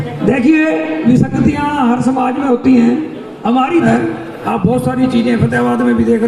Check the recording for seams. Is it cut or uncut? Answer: cut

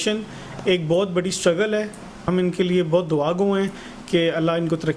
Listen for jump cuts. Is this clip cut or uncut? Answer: cut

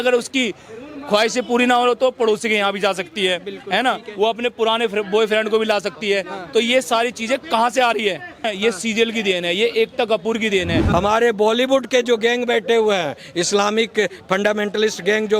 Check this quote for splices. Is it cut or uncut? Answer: cut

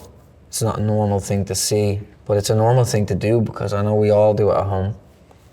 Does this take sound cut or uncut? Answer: cut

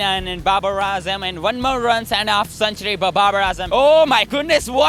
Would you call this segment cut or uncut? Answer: cut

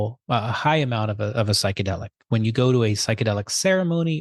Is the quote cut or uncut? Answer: uncut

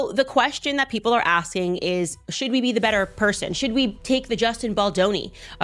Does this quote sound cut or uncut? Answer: uncut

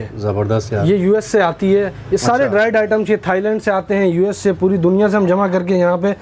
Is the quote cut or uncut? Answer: uncut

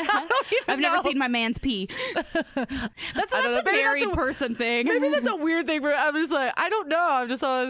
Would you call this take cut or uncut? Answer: cut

